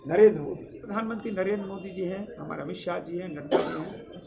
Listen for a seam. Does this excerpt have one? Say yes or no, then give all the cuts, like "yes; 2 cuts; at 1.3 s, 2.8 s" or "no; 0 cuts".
yes; 1 cut; at 0.9 s